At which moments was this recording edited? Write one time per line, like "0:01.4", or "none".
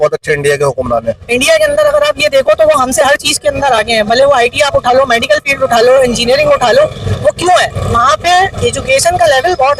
0:01.2